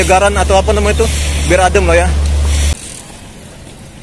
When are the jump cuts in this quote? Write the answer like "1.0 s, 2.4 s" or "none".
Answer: 2.7 s